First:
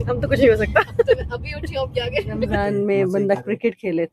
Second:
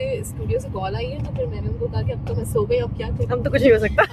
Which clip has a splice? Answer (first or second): first